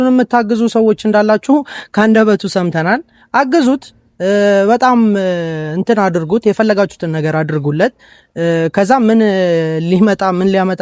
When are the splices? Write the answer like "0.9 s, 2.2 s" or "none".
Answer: none

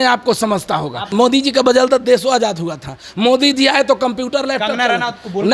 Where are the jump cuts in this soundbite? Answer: 1.1 s

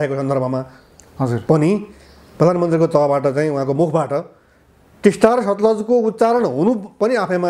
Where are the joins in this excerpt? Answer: none

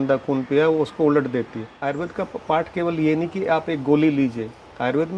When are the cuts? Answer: 1.8 s

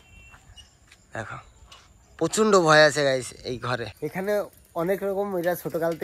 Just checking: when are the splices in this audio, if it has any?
3.9 s

